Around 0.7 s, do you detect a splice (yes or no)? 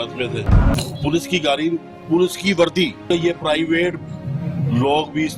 yes